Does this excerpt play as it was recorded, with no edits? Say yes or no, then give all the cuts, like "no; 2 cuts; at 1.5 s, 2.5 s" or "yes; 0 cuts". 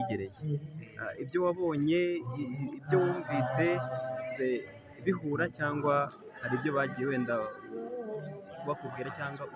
no; 1 cut; at 4.4 s